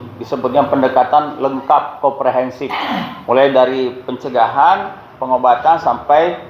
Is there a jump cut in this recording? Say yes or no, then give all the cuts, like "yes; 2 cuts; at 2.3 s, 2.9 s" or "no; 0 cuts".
no; 0 cuts